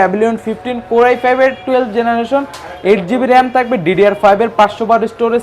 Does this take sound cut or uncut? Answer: uncut